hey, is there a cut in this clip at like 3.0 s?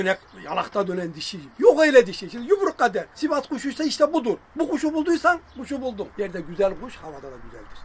yes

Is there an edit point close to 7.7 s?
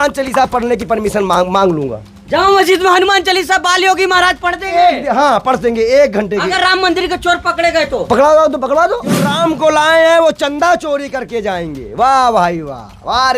no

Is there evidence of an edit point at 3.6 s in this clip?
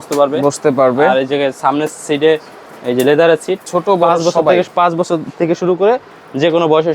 yes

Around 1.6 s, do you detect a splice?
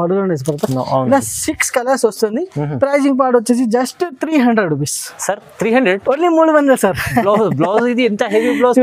no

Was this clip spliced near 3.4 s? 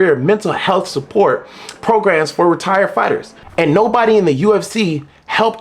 yes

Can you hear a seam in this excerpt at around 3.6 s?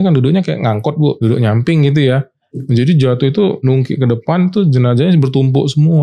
yes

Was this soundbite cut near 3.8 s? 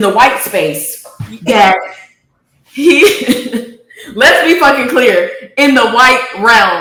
no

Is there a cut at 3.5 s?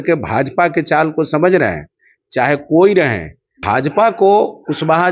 yes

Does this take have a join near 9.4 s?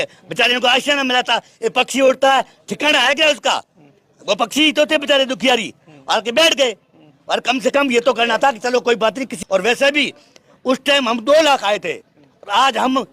yes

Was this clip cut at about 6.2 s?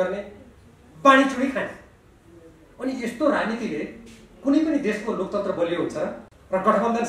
yes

